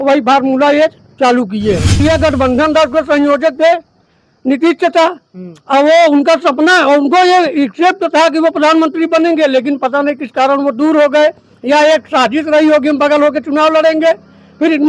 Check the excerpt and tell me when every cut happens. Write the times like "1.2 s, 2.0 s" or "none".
2.0 s

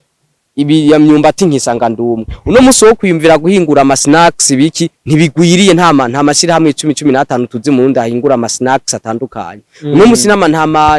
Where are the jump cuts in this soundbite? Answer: none

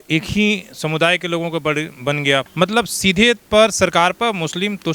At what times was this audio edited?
2.5 s

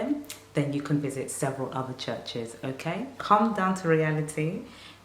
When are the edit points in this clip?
3.1 s

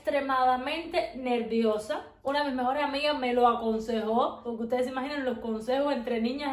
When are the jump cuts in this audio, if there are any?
none

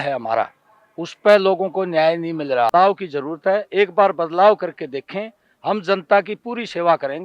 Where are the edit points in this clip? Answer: 2.7 s

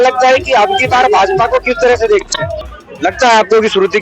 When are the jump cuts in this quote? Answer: 2.6 s

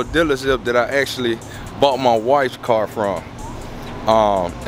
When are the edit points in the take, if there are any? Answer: none

